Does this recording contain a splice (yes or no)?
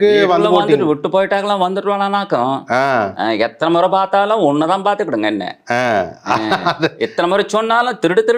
no